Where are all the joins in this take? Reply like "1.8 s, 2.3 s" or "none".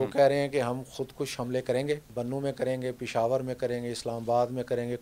2.1 s

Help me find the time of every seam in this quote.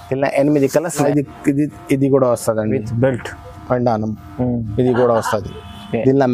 1.0 s

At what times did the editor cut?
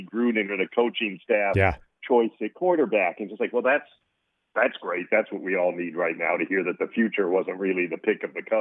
none

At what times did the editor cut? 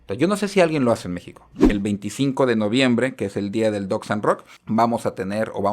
1.6 s, 4.5 s

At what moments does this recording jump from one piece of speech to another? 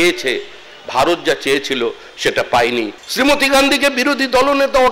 3.0 s

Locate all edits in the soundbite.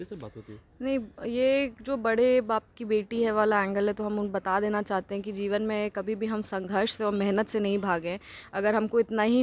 none

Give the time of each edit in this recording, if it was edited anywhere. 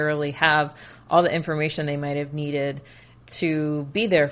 none

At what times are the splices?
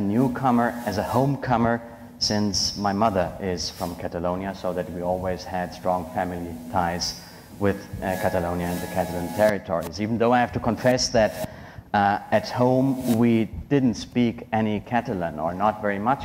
4.9 s

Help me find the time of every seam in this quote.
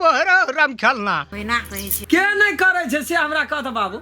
2.0 s

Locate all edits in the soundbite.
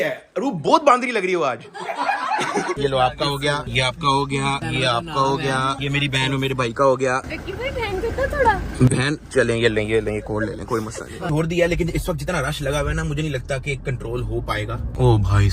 2.7 s, 11.2 s

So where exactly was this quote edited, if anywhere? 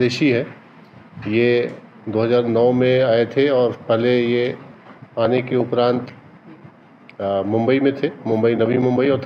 none

